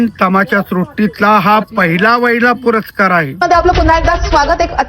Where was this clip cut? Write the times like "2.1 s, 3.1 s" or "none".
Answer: 3.4 s

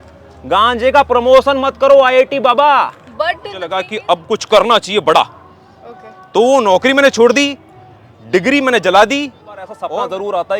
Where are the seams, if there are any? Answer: 3.8 s, 9.8 s

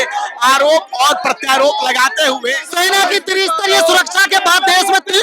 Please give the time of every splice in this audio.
2.7 s

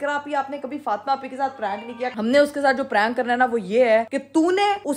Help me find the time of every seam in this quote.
2.1 s

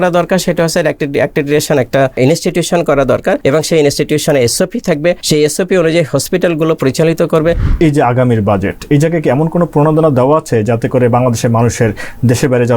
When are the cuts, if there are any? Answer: 2.1 s, 3.4 s, 5.2 s, 7.7 s

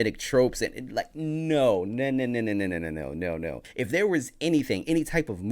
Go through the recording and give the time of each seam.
3.6 s

